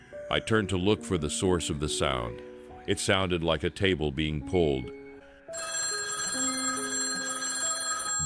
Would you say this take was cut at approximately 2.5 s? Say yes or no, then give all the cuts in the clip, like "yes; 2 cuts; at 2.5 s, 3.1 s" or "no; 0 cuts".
no; 1 cut; at 5.0 s